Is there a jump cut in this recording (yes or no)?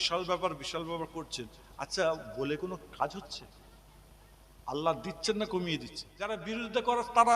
yes